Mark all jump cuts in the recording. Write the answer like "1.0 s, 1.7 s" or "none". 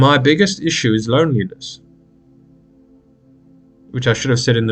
2.3 s, 3.9 s